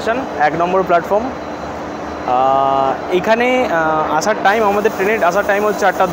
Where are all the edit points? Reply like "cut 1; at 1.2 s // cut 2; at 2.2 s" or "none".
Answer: none